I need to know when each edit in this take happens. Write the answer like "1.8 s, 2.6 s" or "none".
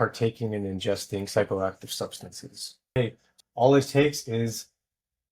3.0 s